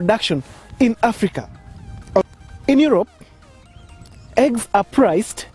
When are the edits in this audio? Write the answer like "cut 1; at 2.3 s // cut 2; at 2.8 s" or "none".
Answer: cut 1; at 2.2 s